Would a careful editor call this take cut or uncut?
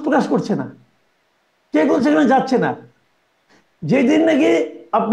uncut